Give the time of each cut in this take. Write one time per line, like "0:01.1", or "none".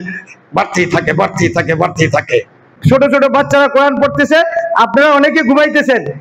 0:02.7